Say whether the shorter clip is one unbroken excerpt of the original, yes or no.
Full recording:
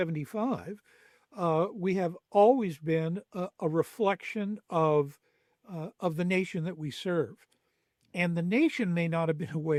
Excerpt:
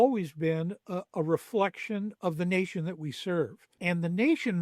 no